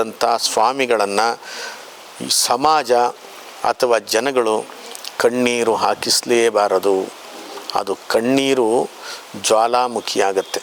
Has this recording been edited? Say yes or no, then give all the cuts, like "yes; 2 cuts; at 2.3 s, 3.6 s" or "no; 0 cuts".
no; 0 cuts